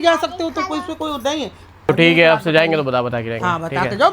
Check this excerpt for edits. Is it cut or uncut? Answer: cut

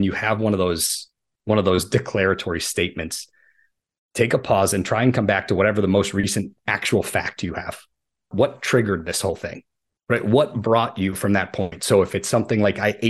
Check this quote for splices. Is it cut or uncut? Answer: cut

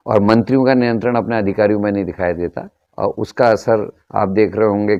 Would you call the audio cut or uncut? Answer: uncut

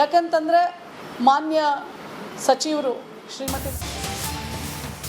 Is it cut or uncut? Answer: cut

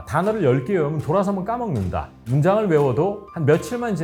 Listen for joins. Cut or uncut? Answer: uncut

